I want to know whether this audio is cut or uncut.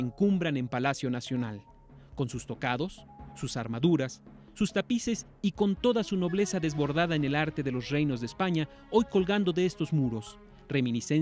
cut